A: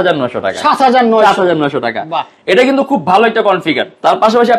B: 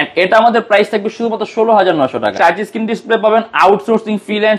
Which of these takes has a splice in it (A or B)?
B